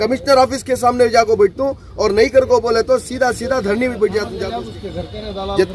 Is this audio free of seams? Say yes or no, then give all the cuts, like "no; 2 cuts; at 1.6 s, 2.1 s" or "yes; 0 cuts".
no; 1 cut; at 4.4 s